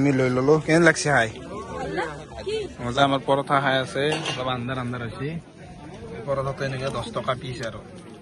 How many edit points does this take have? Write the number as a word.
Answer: one